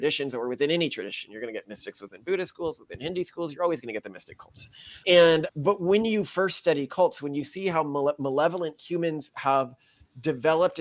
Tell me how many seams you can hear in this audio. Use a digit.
0